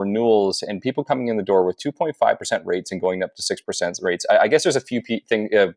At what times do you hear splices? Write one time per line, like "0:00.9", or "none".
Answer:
none